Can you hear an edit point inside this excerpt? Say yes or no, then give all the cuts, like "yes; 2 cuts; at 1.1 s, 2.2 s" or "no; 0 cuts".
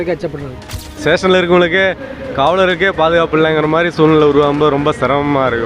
yes; 1 cut; at 1.0 s